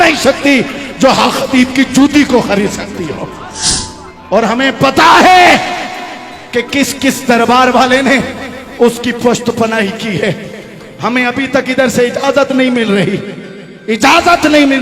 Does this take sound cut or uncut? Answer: cut